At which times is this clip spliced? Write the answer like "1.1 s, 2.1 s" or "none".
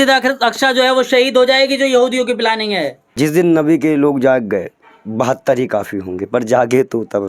3.0 s